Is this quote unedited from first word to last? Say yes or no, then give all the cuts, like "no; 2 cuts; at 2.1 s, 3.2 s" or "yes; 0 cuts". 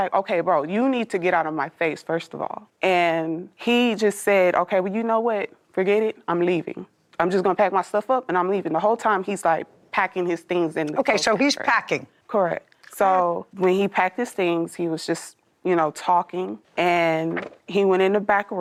yes; 0 cuts